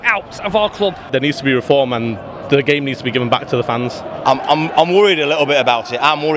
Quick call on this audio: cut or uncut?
cut